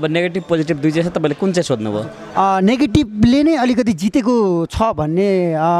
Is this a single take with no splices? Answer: yes; 0 cuts

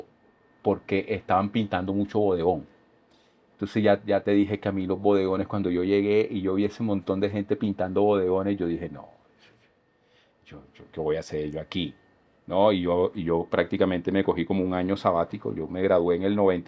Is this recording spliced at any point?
no; 0 cuts

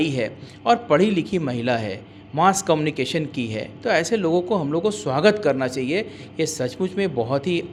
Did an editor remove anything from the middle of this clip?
no; 0 cuts

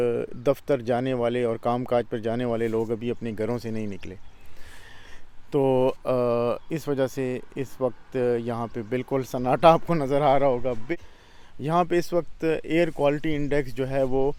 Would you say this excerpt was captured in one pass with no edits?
no; 1 cut; at 10.9 s

